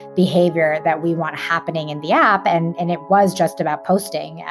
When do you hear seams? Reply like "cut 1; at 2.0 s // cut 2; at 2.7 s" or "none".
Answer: none